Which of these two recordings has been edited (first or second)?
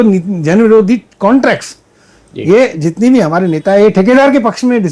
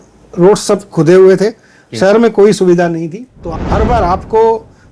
second